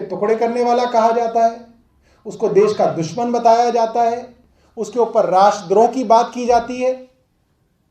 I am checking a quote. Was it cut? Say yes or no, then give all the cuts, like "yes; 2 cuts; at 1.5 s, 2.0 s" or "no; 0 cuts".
no; 0 cuts